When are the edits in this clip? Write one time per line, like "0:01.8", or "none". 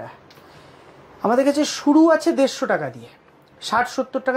none

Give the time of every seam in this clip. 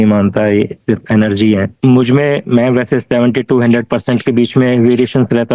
0:01.7

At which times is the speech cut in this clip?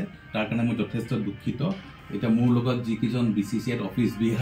0:01.9

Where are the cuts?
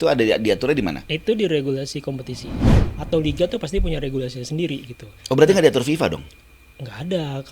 0:02.8

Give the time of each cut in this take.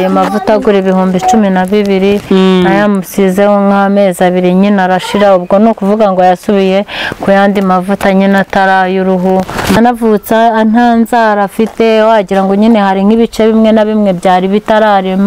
0:09.8

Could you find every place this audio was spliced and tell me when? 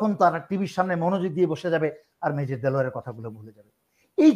none

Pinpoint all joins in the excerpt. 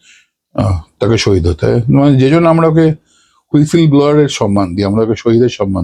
none

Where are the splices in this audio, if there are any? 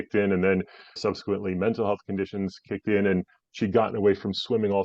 0:01.0

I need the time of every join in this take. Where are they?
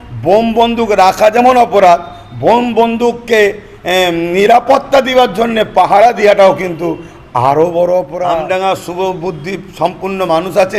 0:08.2

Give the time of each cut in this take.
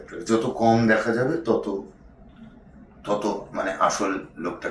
none

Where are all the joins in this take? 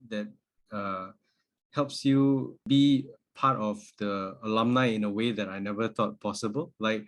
0:02.6

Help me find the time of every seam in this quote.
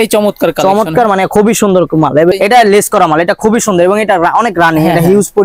0:02.3

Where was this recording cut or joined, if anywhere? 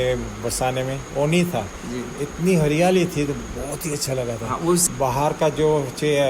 0:04.8

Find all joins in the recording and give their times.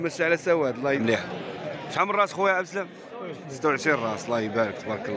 0:01.0

